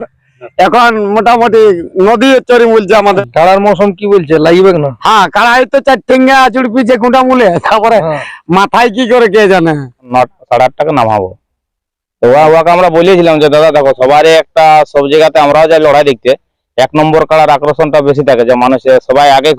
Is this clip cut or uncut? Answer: cut